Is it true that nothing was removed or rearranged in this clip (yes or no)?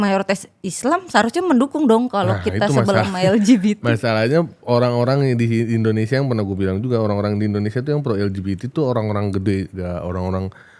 yes